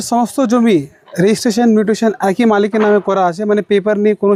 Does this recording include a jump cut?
no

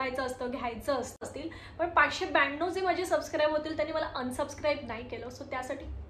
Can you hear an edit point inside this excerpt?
yes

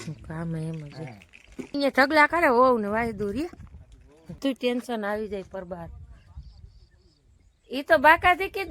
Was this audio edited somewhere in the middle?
yes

